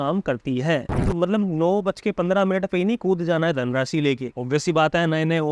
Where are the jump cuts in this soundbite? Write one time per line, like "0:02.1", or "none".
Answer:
0:01.1
0:04.3